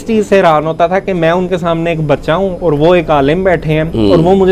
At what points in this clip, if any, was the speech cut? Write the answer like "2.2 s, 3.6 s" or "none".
none